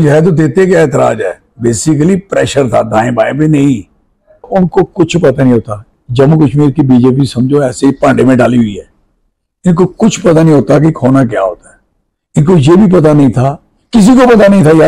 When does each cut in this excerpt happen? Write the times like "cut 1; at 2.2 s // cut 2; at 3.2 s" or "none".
cut 1; at 4.5 s